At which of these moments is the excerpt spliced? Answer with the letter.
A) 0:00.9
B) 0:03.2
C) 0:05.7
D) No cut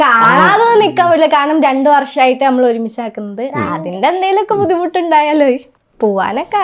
C